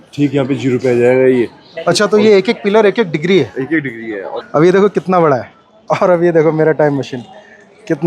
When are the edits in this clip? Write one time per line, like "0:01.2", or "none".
0:01.7
0:04.3